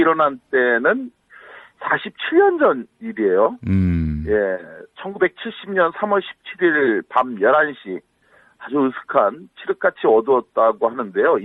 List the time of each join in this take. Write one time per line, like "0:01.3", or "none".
0:03.3